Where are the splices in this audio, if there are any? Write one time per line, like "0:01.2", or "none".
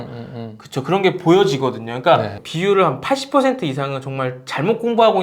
0:02.4